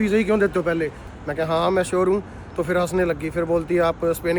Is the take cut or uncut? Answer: cut